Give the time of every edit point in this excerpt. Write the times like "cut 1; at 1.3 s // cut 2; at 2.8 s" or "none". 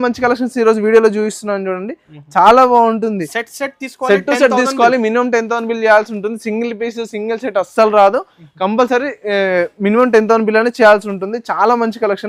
none